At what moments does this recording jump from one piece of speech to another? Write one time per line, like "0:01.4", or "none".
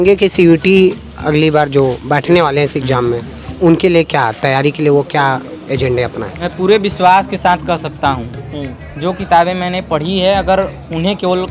0:06.4